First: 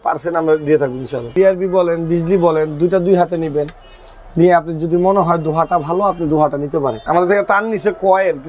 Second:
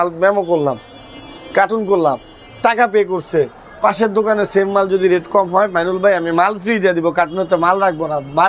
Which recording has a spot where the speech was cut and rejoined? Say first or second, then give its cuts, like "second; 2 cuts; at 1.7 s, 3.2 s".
first; 2 cuts; at 1.3 s, 7.0 s